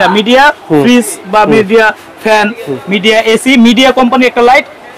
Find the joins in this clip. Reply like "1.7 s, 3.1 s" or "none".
none